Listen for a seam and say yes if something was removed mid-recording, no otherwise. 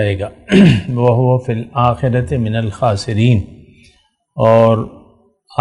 no